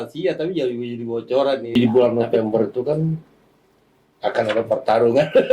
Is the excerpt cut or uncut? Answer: cut